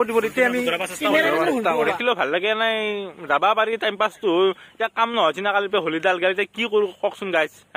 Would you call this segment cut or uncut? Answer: cut